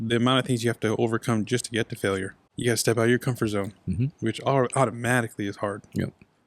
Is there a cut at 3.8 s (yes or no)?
no